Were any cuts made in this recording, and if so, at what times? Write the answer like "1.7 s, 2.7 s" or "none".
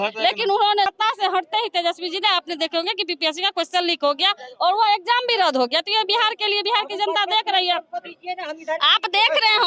0.9 s